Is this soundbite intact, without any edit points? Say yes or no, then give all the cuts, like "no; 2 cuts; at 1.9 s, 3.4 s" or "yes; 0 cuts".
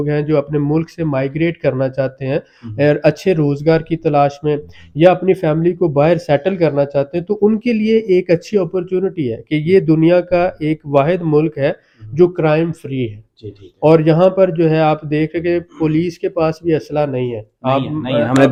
yes; 0 cuts